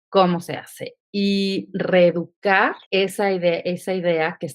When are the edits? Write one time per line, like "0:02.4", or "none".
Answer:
0:02.8